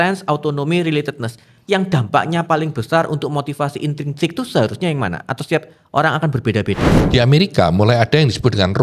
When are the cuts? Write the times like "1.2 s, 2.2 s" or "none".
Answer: 6.9 s